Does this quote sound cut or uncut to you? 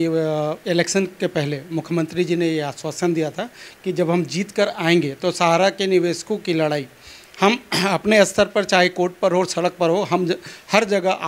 uncut